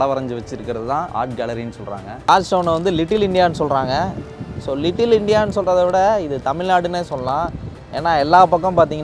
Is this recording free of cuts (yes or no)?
no